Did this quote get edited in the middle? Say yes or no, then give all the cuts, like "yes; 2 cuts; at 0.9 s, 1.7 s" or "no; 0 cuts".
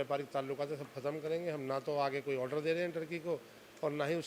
no; 0 cuts